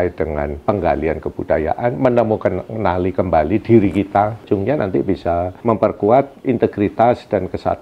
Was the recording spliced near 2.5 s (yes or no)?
no